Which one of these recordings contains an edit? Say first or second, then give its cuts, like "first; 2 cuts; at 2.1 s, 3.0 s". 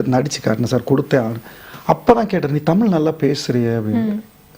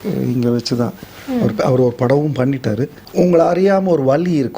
second; 1 cut; at 3.0 s